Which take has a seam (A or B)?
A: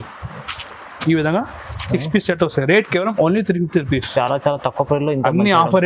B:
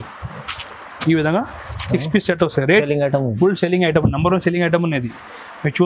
B